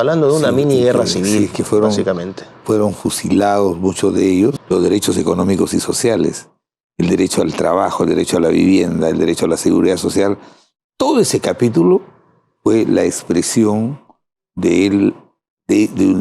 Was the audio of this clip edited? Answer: yes; 1 cut; at 4.6 s

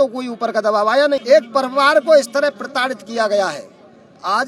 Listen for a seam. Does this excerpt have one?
yes; 1 cut; at 1.2 s

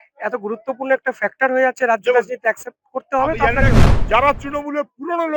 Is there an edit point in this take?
yes; 1 cut; at 3.8 s

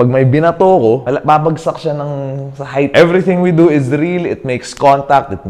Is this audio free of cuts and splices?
no; 2 cuts; at 1.0 s, 2.9 s

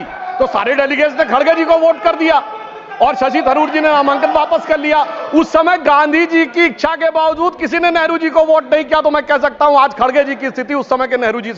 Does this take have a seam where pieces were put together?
no; 0 cuts

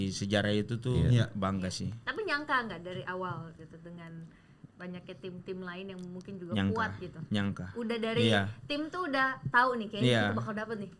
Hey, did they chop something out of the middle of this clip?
no; 0 cuts

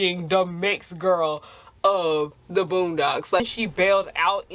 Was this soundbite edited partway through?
yes; 1 cut; at 3.4 s

